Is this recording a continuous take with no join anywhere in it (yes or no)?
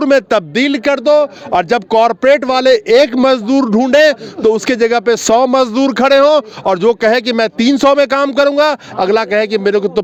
yes